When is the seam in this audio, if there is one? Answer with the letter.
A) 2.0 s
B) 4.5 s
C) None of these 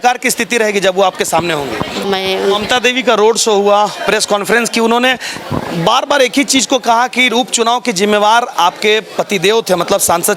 A